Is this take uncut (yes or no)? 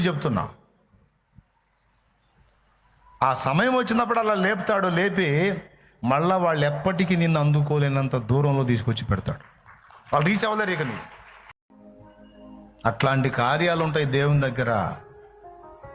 no